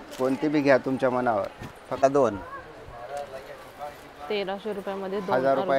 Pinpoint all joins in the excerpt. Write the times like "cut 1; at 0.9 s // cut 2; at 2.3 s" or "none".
cut 1; at 2.0 s

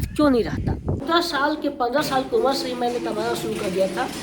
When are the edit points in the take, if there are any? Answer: cut 1; at 1.0 s

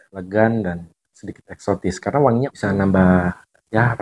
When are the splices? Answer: cut 1; at 2.5 s

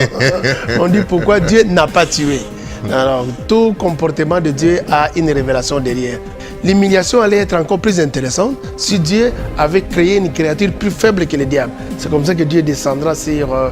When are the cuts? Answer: cut 1; at 6.4 s

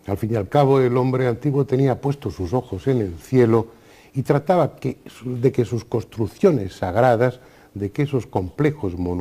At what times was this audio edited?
cut 1; at 2.7 s

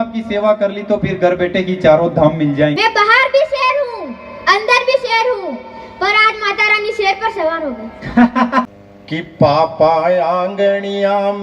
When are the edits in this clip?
cut 1; at 2.8 s // cut 2; at 8.7 s

